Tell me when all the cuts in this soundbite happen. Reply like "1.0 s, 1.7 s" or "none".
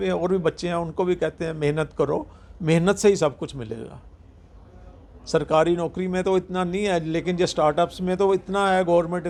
none

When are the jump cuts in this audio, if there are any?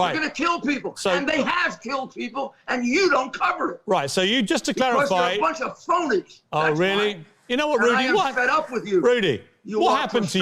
6.8 s

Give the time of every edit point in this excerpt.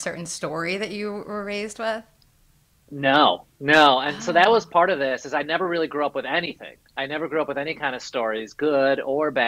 none

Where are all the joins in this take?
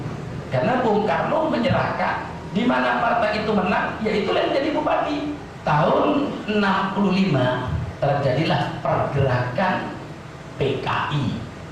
5.5 s

